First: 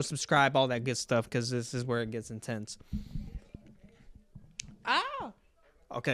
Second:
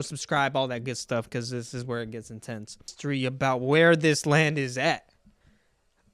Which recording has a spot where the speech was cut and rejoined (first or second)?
second